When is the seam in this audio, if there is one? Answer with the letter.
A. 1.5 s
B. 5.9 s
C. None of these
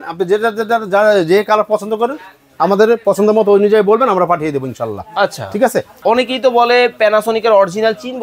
B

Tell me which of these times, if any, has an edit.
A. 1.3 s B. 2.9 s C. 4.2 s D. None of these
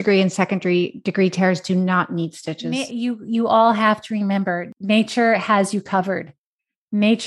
B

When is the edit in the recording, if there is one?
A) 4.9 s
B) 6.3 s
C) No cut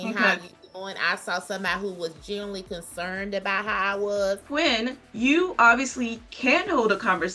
A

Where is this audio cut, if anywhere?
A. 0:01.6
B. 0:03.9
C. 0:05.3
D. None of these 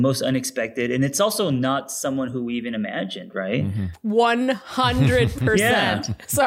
B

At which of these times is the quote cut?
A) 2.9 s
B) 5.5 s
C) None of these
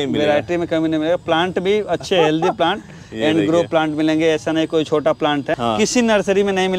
B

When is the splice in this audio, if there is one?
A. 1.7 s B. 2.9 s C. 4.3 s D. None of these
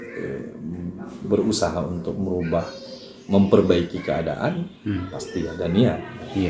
D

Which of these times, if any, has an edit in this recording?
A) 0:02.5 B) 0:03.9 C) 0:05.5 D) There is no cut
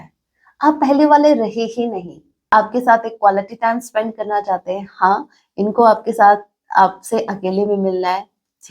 A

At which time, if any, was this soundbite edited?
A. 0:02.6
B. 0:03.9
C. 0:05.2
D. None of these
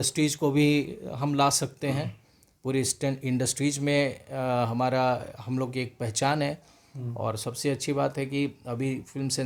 D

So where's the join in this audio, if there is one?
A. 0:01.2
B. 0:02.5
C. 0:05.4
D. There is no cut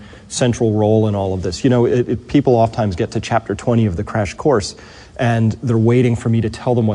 C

